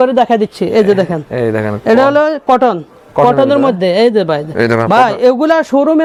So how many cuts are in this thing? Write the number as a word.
zero